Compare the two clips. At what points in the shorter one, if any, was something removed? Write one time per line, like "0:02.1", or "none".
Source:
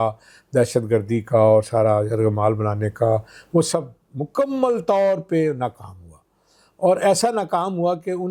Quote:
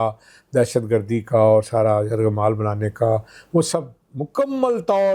none